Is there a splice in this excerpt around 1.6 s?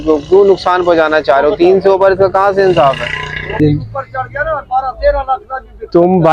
no; 1 cut; at 3.6 s

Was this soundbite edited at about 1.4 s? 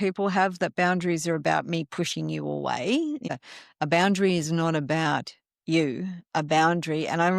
no; 1 cut; at 3.3 s

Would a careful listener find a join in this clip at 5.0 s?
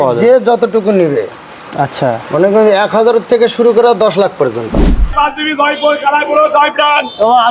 yes; 1 cut; at 5.0 s

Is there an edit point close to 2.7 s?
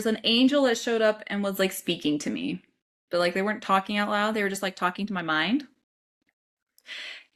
no; 0 cuts

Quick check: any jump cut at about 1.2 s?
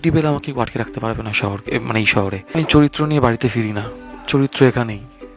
no; 1 cut; at 2.5 s

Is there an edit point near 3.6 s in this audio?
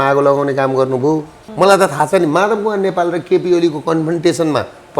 no; 1 cut; at 1.4 s

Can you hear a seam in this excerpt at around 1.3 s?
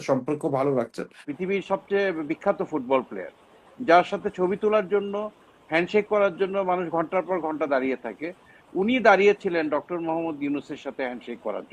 yes; 1 cut; at 1.3 s

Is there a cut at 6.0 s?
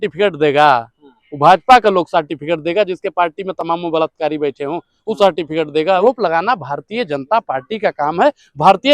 yes; 1 cut; at 6.0 s

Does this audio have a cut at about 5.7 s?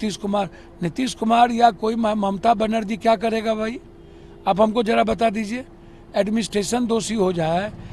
no; 0 cuts

